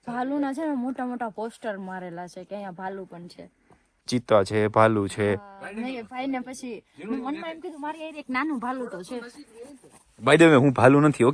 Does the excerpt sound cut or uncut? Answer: uncut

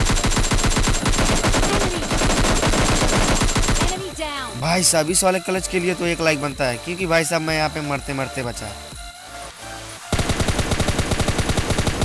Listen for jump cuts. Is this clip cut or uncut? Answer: cut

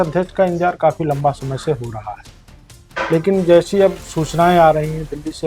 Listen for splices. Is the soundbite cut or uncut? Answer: uncut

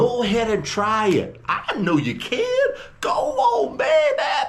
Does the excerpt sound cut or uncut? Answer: uncut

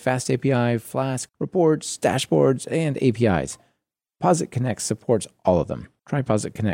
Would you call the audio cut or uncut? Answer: cut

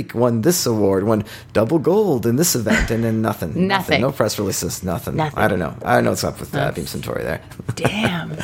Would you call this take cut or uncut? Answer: uncut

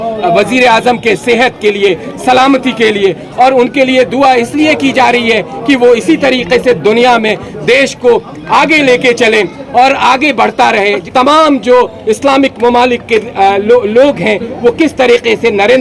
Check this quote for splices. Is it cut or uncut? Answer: cut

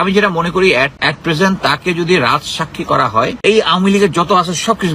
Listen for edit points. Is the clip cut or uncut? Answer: cut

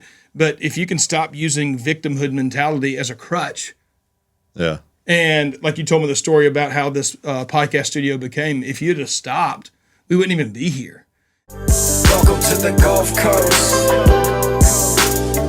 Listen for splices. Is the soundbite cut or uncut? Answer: cut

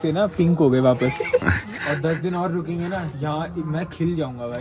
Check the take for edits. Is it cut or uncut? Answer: cut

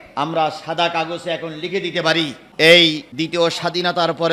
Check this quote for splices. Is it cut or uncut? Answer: cut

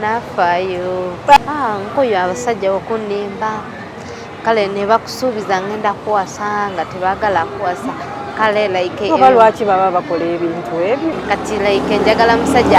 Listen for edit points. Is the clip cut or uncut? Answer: cut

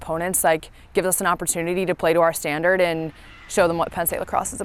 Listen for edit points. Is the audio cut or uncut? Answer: uncut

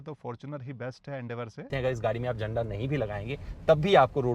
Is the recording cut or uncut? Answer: cut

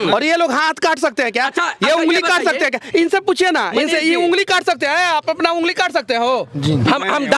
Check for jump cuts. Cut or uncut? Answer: uncut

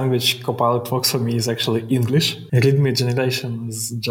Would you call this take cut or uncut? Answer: cut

